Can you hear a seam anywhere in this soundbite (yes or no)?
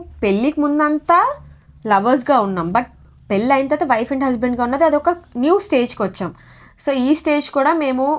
no